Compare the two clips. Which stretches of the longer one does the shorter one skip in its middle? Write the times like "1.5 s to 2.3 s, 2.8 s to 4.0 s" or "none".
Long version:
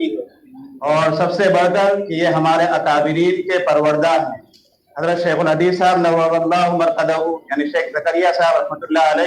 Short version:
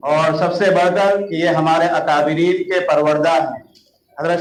none